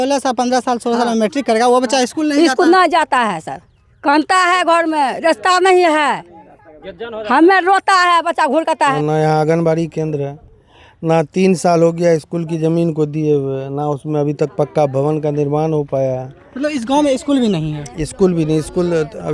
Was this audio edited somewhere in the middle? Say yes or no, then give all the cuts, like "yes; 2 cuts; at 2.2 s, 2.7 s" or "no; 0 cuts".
yes; 1 cut; at 8.9 s